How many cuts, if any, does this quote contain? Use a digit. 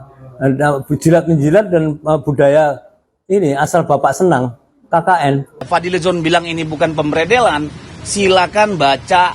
1